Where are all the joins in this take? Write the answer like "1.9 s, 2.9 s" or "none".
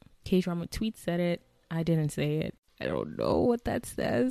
2.7 s